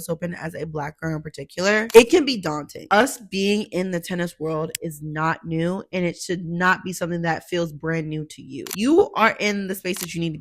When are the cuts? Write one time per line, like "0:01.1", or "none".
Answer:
0:02.8
0:08.7